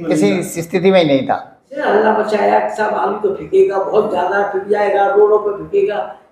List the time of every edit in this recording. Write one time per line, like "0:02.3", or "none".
0:01.8